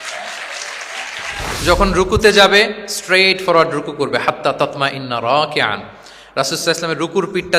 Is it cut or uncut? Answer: cut